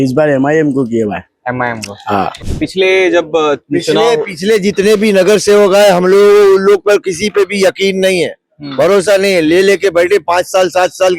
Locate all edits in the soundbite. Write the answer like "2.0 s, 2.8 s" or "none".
2.3 s